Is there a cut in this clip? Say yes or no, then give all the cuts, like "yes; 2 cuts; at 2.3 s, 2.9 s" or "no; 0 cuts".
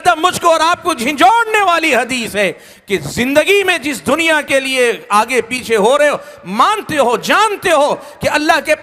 no; 0 cuts